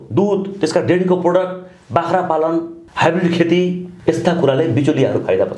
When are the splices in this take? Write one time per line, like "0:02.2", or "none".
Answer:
0:02.8
0:03.9

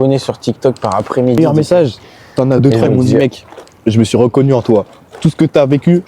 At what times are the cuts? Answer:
0:01.4

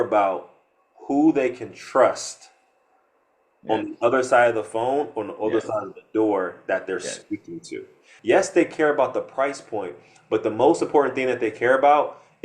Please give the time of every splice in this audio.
0:08.1

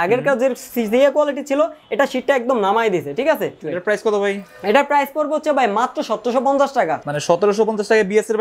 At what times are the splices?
0:03.6
0:07.0

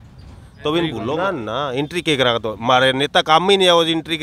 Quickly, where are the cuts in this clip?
0:01.1

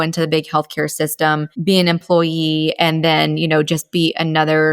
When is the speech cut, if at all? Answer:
0:01.5

